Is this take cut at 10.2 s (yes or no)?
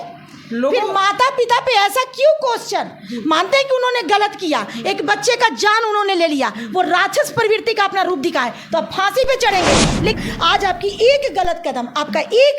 yes